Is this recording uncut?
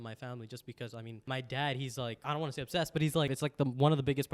no; 3 cuts; at 1.1 s, 2.2 s, 3.3 s

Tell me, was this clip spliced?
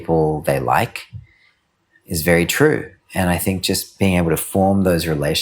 no; 0 cuts

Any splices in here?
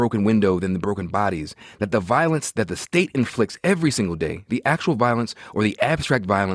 no; 0 cuts

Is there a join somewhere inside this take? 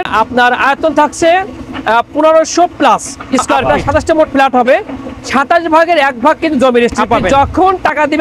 yes; 2 cuts; at 3.6 s, 7.2 s

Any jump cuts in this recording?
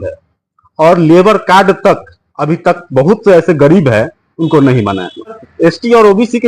yes; 1 cut; at 5.4 s

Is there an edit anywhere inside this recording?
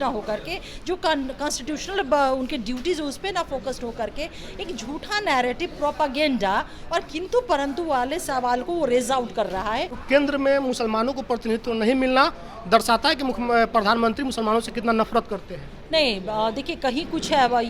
yes; 1 cut; at 10.0 s

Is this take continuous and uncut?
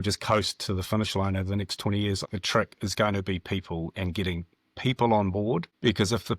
no; 1 cut; at 2.2 s

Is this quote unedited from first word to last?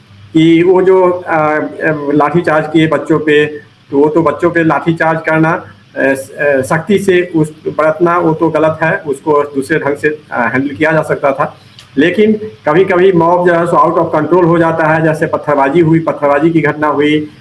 yes; 0 cuts

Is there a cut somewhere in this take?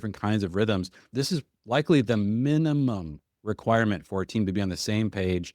yes; 1 cut; at 1.1 s

